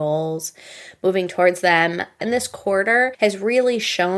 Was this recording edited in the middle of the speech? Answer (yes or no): yes